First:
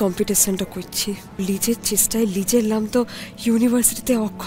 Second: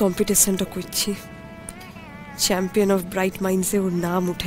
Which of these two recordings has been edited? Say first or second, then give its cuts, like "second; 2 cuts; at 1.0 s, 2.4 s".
first; 1 cut; at 1.4 s